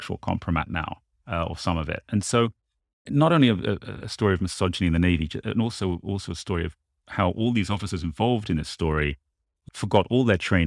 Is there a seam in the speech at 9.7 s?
no; 1 cut; at 3.1 s

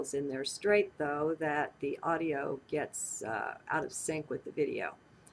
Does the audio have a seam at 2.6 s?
no; 1 cut; at 4.0 s

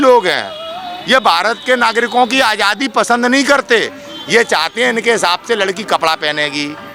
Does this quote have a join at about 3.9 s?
no; 0 cuts

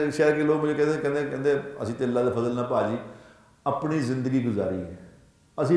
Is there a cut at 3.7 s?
no; 0 cuts

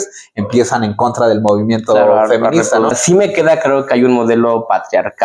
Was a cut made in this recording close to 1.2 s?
no; 1 cut; at 3.0 s

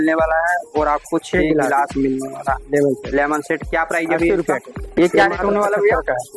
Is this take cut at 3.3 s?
no; 1 cut; at 4.8 s

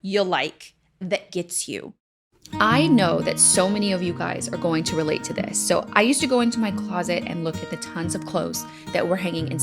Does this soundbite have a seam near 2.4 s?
yes; 1 cut; at 2.4 s

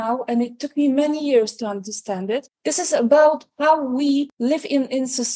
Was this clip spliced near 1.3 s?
no; 2 cuts; at 2.5 s, 4.3 s

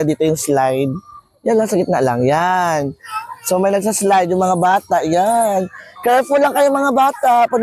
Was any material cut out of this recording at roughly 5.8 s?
no; 0 cuts

